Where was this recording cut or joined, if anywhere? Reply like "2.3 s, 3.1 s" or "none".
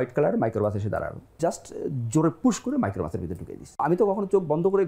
3.6 s